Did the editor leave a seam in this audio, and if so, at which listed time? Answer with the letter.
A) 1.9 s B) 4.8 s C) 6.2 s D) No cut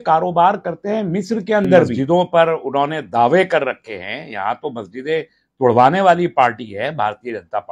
A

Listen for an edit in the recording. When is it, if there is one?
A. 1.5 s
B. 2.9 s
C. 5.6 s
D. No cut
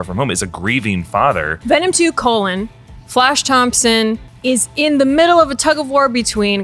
A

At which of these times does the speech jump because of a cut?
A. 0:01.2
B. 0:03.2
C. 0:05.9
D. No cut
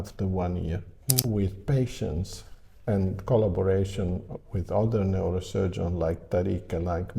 A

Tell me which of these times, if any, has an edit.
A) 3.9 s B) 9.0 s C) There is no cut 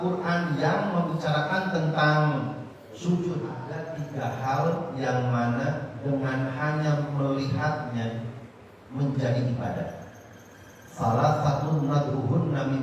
A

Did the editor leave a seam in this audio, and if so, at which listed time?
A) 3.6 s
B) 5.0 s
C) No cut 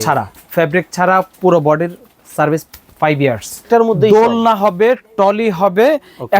A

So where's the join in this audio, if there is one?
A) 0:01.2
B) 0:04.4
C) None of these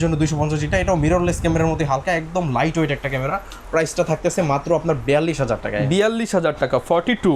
C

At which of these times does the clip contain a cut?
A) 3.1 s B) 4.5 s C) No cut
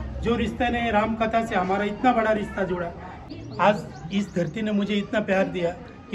A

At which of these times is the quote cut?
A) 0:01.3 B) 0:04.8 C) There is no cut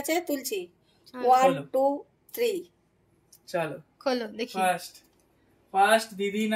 C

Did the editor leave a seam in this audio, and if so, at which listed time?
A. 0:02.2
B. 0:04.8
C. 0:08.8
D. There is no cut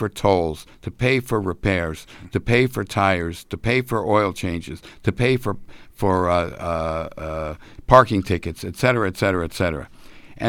D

